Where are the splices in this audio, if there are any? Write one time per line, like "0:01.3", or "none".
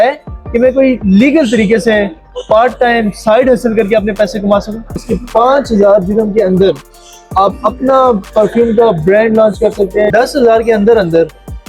0:05.1
0:10.1